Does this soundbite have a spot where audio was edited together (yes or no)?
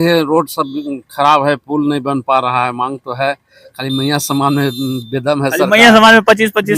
no